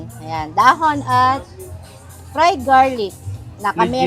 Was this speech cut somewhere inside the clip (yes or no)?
no